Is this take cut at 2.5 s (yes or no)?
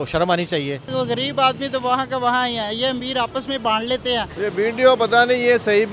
no